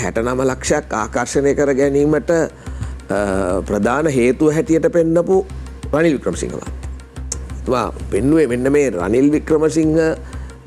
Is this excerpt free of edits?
yes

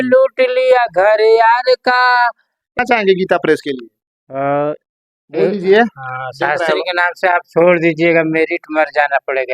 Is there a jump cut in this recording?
yes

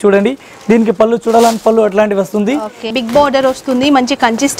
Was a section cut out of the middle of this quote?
yes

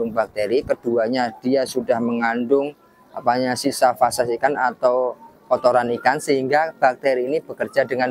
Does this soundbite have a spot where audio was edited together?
no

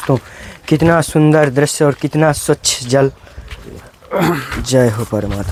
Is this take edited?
no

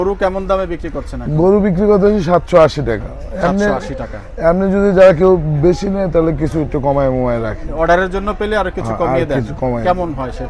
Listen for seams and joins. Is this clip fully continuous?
yes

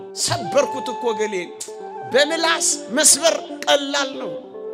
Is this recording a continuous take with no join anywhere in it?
yes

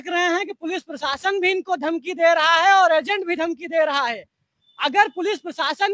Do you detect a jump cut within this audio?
no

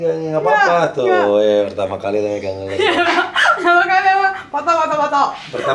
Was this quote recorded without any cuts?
yes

